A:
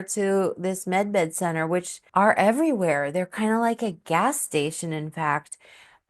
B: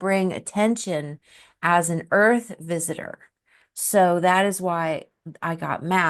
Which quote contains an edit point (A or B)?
A